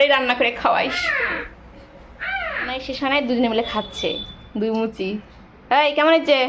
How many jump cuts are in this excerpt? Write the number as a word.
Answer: one